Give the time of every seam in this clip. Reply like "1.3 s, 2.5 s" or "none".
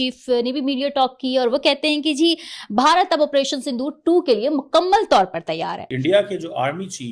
5.8 s